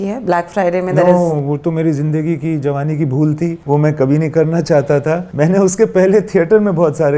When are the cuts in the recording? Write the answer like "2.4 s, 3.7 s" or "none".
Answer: 3.6 s, 5.3 s